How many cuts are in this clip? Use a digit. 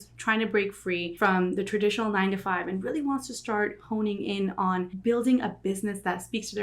2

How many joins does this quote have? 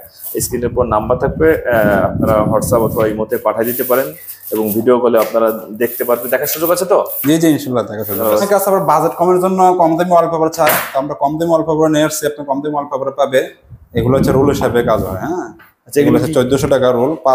1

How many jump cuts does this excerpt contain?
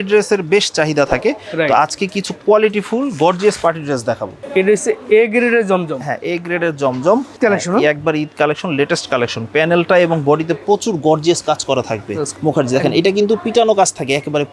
3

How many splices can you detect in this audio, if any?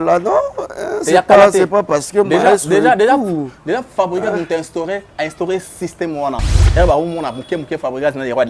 1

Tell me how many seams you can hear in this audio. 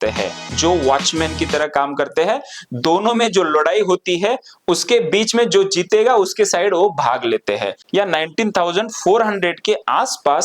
1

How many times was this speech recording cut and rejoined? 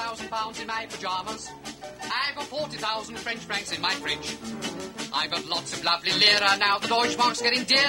0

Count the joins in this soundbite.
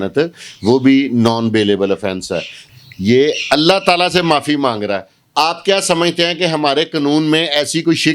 1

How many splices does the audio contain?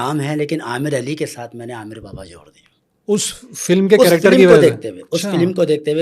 0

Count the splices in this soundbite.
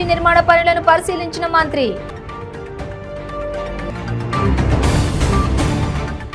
1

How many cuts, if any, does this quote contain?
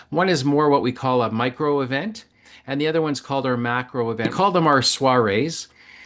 1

